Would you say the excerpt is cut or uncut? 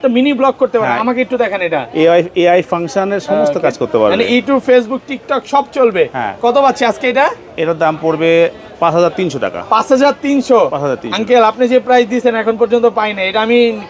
uncut